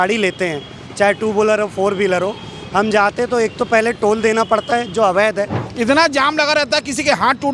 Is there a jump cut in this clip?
yes; 1 cut; at 5.6 s

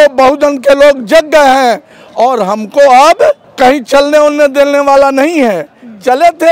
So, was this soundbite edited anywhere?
no; 0 cuts

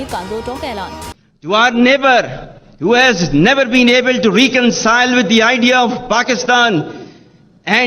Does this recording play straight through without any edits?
no; 1 cut; at 1.1 s

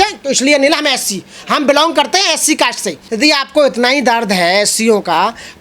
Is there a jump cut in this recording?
yes; 1 cut; at 3.0 s

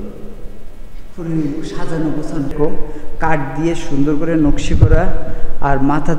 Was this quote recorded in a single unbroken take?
no; 1 cut; at 2.5 s

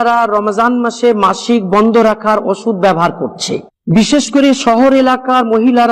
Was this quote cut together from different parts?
yes; 1 cut; at 4.1 s

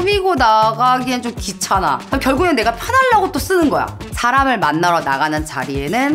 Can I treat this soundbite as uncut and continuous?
no; 2 cuts; at 2.1 s, 4.0 s

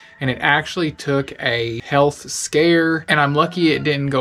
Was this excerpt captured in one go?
yes; 0 cuts

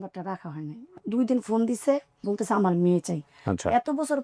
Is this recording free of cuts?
no; 2 cuts; at 0.9 s, 2.1 s

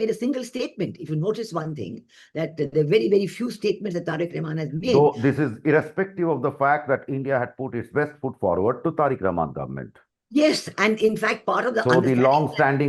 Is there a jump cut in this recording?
no; 0 cuts

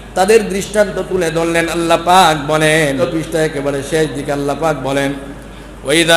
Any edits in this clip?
yes; 1 cut; at 3.0 s

